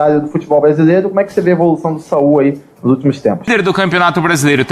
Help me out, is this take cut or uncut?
cut